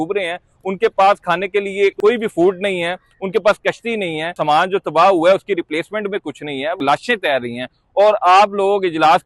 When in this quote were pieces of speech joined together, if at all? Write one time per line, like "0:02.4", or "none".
0:02.0
0:04.4
0:06.8